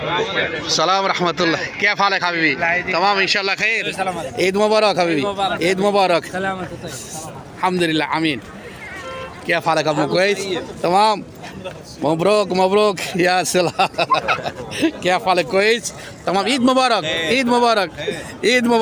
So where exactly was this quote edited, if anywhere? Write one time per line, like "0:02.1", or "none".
none